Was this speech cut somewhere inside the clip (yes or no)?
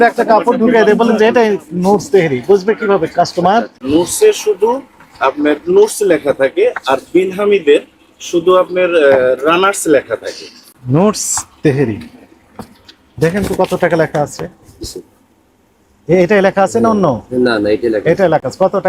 no